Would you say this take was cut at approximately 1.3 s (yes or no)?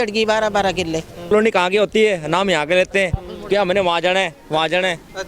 yes